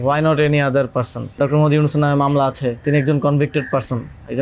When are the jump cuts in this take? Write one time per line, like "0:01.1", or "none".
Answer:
0:01.4
0:02.8